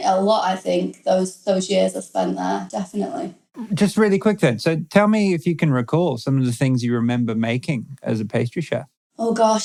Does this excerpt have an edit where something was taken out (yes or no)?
no